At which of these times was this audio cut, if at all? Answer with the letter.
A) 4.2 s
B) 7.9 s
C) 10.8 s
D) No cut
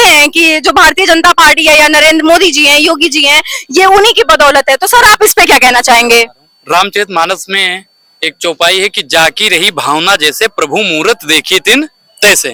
D